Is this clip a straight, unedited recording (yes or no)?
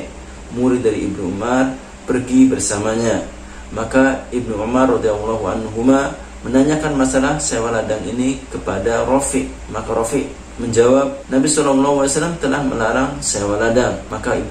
yes